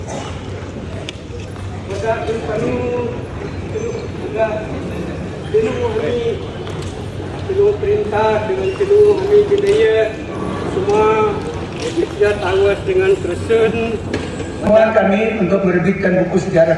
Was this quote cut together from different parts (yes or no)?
yes